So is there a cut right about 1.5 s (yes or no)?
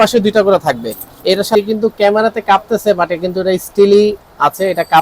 yes